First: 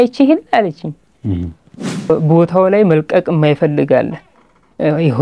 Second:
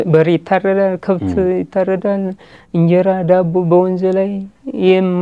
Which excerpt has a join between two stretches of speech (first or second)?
first